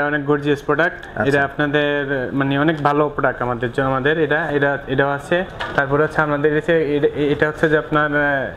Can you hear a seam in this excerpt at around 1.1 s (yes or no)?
no